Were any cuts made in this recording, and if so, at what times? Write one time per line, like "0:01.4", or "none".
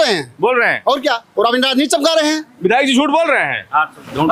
none